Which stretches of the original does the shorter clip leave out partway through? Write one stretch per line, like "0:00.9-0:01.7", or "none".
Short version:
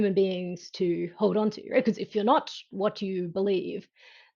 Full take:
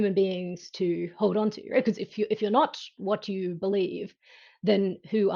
0:02.1-0:02.4